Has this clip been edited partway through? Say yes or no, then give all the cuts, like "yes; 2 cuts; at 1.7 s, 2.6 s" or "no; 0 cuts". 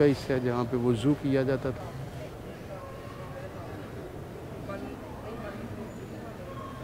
yes; 1 cut; at 1.8 s